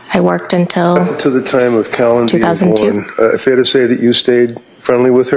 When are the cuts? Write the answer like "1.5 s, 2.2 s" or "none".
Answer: 1.1 s